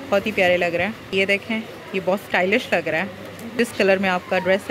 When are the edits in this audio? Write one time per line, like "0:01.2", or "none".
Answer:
0:01.1
0:03.5